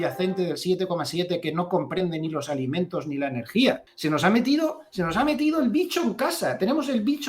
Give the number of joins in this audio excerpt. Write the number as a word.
one